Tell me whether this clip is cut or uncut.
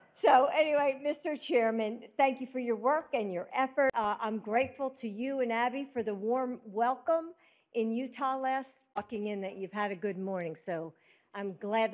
uncut